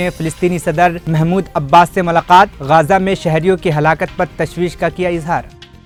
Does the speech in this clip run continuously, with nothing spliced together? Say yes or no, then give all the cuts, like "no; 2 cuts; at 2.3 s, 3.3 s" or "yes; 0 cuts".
yes; 0 cuts